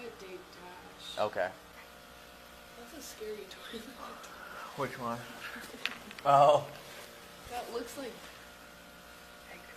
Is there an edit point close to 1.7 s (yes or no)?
yes